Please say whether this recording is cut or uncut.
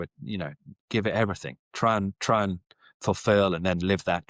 uncut